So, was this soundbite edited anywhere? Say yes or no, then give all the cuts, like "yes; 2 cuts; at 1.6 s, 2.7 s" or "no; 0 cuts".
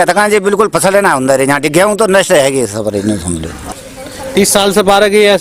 yes; 1 cut; at 3.8 s